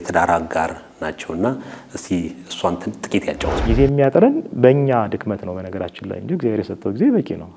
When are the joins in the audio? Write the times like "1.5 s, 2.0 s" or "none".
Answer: 3.5 s